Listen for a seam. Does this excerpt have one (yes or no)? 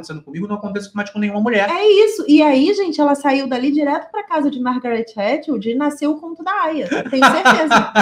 no